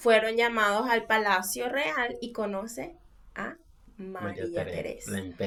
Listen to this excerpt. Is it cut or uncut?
uncut